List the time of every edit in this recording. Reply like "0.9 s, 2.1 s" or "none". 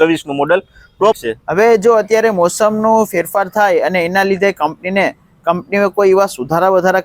1.2 s